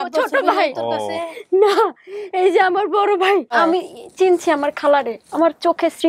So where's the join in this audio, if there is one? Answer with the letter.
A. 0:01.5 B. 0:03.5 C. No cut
B